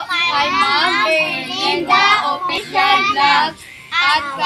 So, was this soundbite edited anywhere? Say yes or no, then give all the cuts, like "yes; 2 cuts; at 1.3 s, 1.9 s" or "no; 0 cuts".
no; 0 cuts